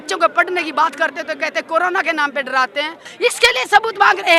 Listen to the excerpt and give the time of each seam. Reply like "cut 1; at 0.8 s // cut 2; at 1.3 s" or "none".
cut 1; at 3.0 s

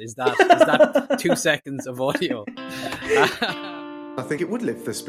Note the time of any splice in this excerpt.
cut 1; at 3.4 s

